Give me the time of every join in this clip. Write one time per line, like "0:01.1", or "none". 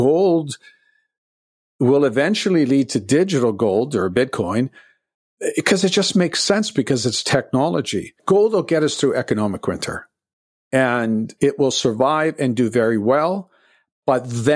0:08.2